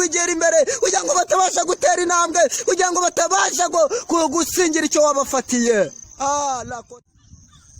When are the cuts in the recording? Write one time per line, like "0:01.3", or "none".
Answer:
0:06.7